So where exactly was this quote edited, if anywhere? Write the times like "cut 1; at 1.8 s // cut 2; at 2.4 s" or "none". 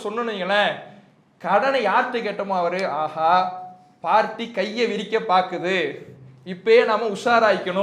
none